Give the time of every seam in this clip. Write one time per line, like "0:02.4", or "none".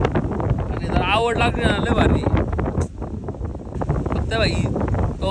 0:03.7